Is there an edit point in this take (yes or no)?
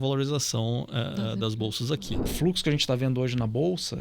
yes